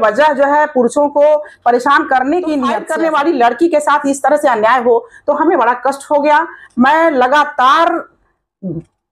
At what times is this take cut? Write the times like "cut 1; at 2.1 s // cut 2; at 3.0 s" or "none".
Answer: cut 1; at 2.8 s